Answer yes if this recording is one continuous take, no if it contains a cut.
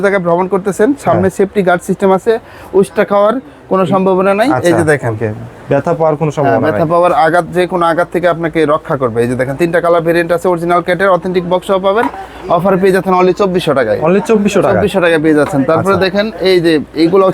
yes